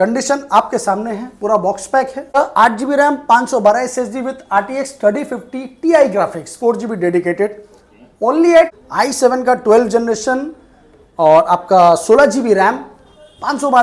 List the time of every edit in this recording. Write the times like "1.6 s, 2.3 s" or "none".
2.4 s, 8.8 s